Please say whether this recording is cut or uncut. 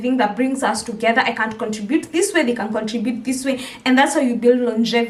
uncut